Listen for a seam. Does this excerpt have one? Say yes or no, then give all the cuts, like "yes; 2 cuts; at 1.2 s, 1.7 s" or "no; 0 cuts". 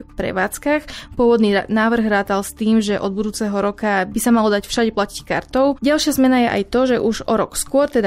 yes; 2 cuts; at 4.1 s, 5.8 s